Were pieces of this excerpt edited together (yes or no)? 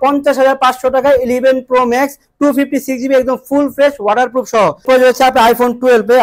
no